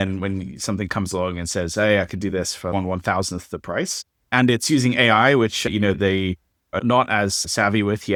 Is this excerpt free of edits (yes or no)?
yes